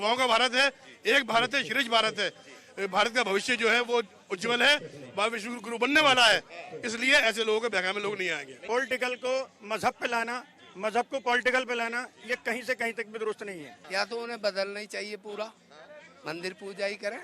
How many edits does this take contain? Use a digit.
2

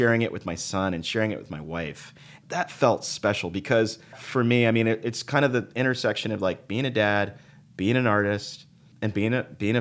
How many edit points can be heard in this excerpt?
3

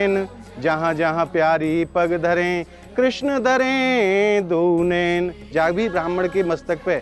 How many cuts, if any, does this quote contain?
1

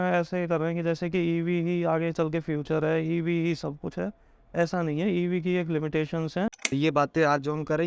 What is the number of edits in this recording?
1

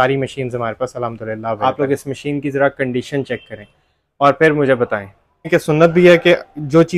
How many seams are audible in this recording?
2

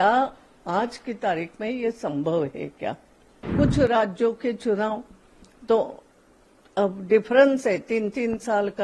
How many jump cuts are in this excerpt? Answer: 1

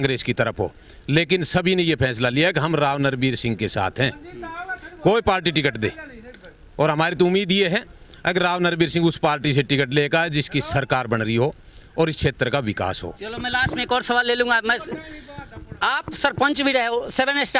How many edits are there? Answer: 0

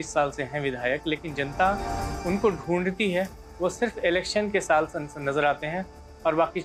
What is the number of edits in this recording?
0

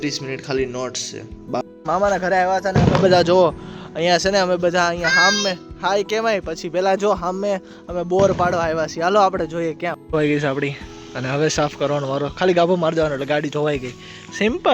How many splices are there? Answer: 2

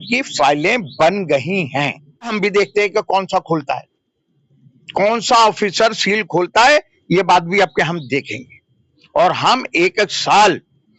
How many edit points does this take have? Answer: 1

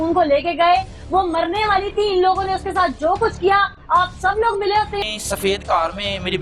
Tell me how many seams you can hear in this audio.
1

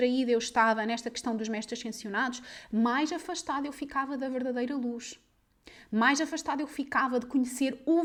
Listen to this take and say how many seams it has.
0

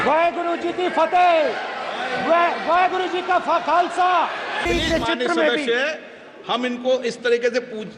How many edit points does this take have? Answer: 1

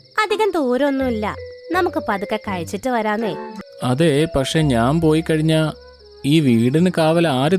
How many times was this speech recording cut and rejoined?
1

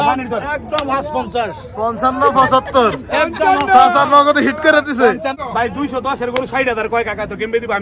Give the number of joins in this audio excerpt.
1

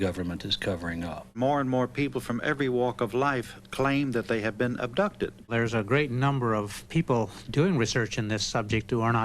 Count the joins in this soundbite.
2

